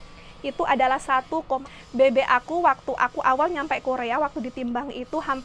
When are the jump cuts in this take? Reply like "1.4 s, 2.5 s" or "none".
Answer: 1.7 s